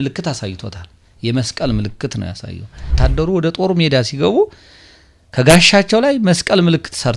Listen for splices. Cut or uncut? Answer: cut